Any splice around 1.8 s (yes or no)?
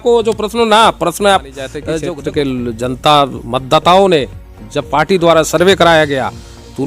yes